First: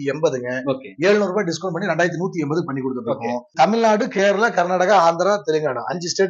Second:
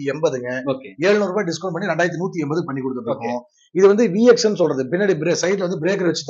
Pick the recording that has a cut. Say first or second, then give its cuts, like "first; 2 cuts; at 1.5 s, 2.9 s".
first; 1 cut; at 3.5 s